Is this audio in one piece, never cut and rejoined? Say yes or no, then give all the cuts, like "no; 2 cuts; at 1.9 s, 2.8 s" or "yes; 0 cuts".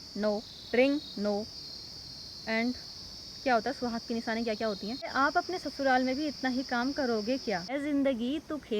no; 2 cuts; at 5.1 s, 7.8 s